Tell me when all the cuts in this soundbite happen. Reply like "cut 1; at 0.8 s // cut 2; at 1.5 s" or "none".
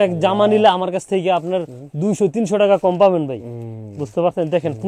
none